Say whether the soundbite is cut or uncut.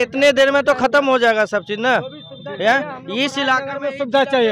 uncut